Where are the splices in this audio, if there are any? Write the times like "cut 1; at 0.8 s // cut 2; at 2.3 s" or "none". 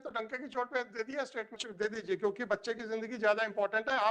cut 1; at 1.6 s